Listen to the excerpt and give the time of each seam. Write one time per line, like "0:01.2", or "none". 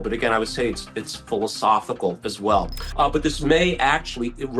0:02.8